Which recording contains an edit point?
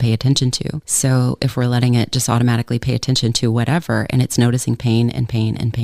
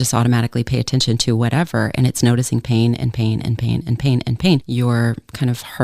second; 1 cut; at 4.7 s

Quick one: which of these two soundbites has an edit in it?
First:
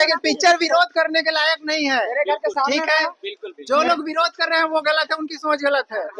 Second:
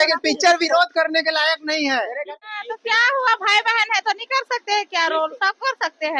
second; 1 cut; at 2.2 s

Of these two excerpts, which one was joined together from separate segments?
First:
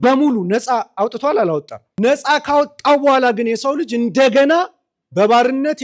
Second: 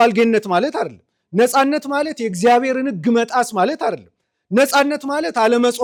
first; 1 cut; at 1.8 s

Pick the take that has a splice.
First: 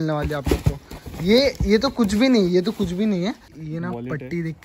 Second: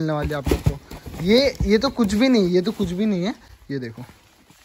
first; 1 cut; at 3.6 s

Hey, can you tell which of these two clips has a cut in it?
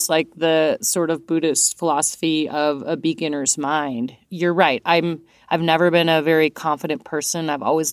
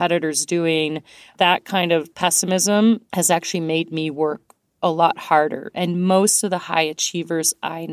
second; 3 cuts; at 1.2 s, 2.1 s, 3.1 s

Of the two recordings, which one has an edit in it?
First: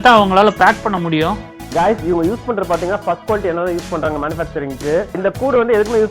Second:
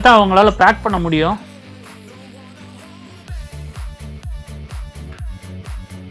first; 2 cuts; at 1.5 s, 5.1 s

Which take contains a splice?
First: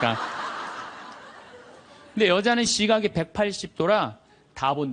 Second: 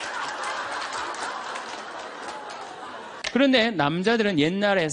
second; 1 cut; at 3.0 s

